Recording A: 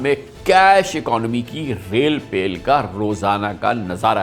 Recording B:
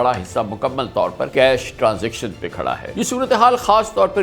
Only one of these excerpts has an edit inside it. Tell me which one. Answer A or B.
B